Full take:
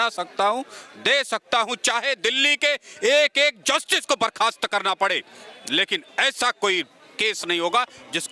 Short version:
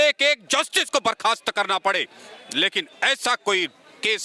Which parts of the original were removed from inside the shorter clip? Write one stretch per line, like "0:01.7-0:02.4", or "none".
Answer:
none